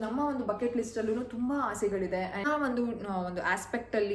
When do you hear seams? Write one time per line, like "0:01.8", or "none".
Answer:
0:02.5